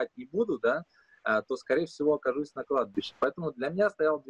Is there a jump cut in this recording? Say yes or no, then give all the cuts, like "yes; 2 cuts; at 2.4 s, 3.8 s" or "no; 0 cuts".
no; 0 cuts